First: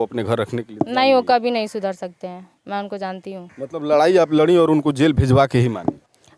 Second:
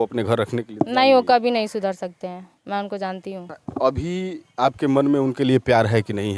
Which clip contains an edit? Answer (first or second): first